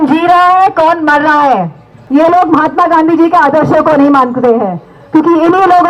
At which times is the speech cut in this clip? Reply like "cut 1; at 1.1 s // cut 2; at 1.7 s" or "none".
cut 1; at 1.9 s